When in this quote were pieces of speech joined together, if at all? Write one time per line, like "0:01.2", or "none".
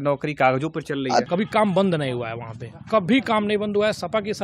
0:01.2